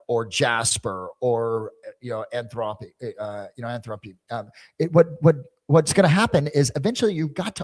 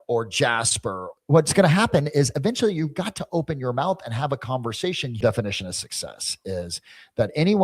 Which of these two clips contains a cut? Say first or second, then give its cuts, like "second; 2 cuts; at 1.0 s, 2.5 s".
second; 2 cuts; at 1.1 s, 5.2 s